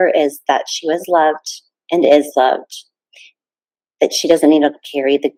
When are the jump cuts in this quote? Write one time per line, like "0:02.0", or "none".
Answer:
none